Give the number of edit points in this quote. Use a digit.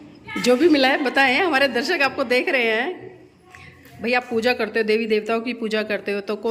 0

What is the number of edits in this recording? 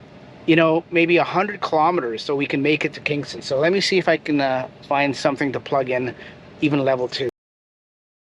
0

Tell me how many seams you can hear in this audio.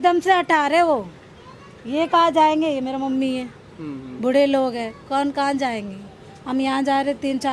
0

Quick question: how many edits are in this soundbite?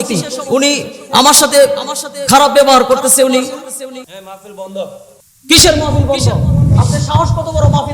1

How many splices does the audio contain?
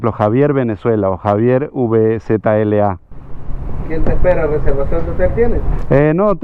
1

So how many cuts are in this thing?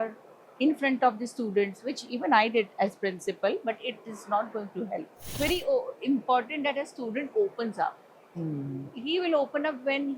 1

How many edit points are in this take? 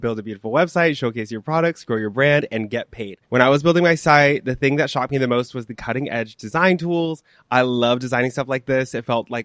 1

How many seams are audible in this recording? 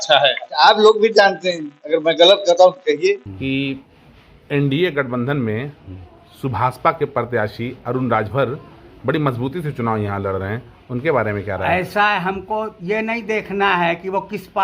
1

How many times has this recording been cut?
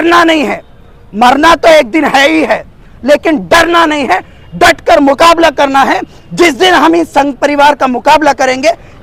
0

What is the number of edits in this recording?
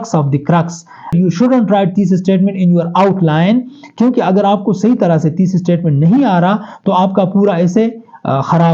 1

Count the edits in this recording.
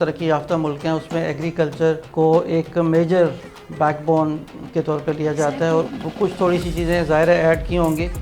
2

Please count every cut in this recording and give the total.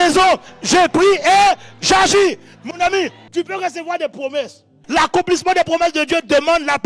2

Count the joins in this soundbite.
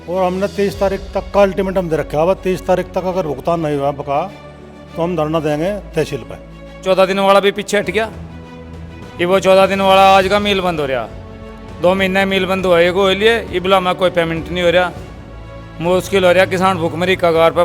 1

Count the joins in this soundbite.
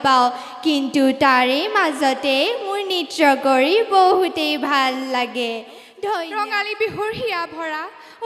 1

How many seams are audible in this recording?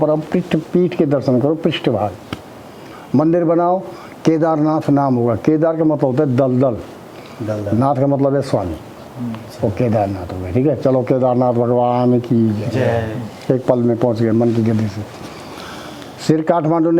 0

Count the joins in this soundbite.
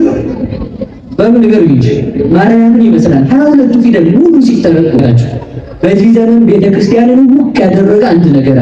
1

